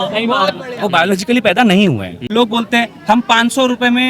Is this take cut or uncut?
cut